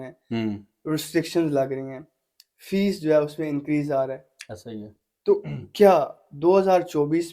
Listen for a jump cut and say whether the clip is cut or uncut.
uncut